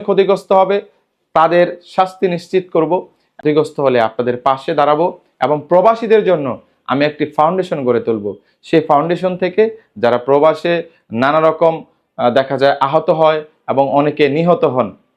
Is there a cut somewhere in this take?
yes; 1 cut; at 3.3 s

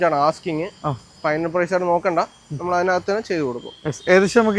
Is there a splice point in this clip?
no; 0 cuts

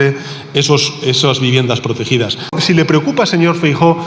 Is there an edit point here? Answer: yes; 1 cut; at 2.5 s

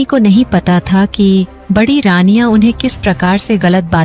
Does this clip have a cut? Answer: no; 0 cuts

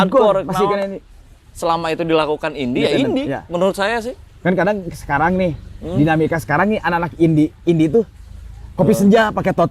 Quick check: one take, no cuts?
yes; 0 cuts

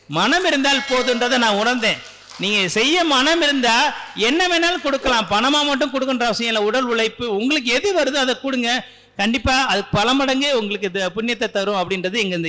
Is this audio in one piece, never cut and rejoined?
yes; 0 cuts

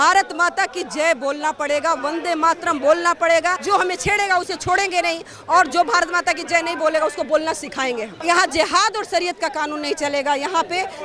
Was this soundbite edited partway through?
yes; 2 cuts; at 3.6 s, 8.1 s

